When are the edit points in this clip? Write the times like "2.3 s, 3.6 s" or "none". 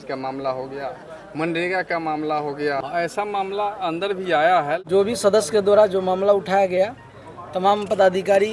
2.8 s, 4.8 s